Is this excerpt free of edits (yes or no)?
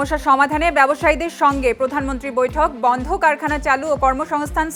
yes